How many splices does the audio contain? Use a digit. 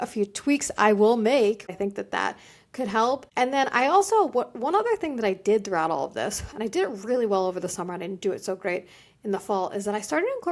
2